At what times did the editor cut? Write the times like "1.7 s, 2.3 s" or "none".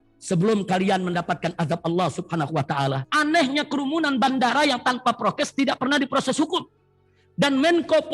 3.0 s